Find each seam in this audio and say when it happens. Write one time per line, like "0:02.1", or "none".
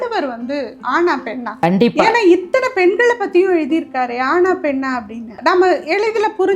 0:01.6
0:05.4